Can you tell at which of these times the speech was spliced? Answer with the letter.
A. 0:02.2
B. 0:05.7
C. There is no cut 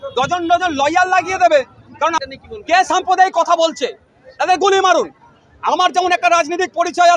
A